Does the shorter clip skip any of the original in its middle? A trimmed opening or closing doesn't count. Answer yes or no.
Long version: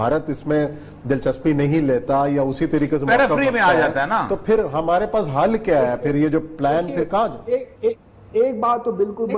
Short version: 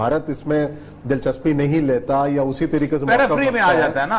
no